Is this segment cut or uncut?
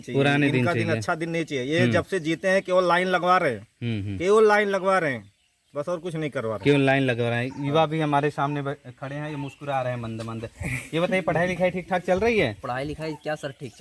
uncut